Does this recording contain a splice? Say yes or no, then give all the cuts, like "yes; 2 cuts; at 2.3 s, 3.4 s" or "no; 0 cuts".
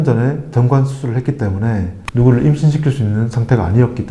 no; 0 cuts